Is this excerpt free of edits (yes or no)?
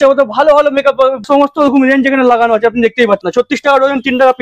no